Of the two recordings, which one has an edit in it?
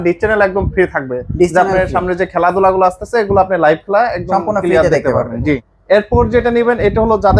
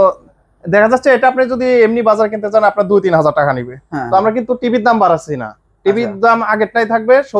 first; 1 cut; at 5.7 s

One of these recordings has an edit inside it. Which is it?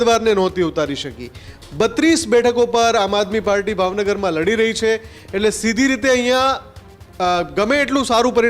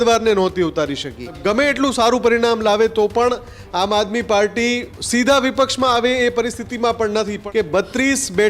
second; 3 cuts; at 1.4 s, 4.9 s, 7.4 s

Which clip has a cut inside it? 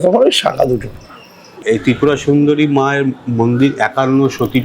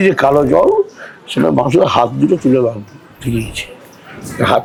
first; 1 cut; at 1.6 s

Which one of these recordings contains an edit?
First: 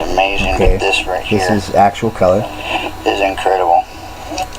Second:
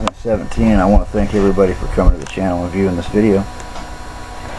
first; 1 cut; at 1.9 s

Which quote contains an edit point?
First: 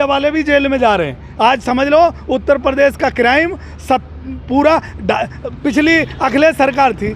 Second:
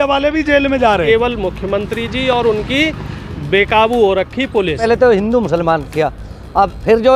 second; 2 cuts; at 1.0 s, 4.8 s

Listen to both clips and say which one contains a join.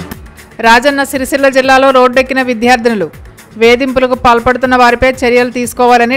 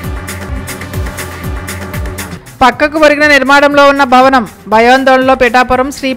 second; 1 cut; at 2.3 s

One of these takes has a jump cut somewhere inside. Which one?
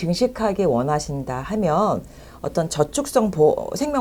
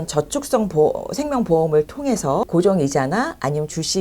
second; 1 cut; at 2.4 s

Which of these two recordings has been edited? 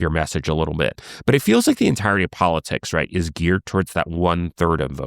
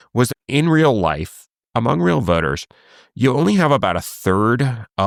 first; 1 cut; at 1.0 s

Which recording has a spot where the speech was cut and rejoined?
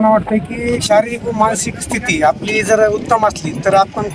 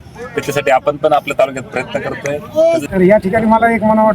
second; 1 cut; at 2.8 s

